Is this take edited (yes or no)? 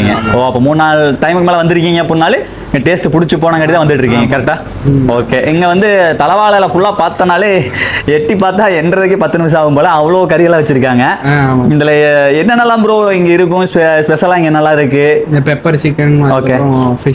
no